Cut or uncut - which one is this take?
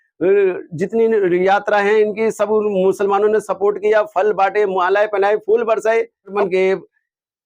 cut